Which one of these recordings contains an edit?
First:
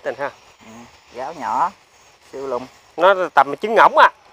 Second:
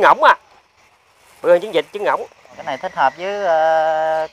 second; 1 cut; at 2.7 s

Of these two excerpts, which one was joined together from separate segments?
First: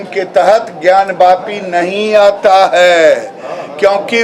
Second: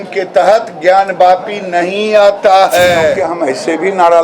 second; 1 cut; at 3.3 s

